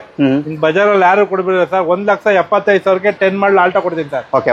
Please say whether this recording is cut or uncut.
uncut